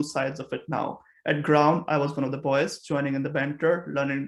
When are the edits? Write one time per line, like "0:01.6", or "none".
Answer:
none